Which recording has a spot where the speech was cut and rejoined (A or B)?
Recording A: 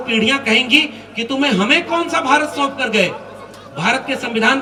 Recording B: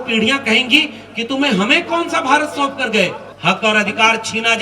B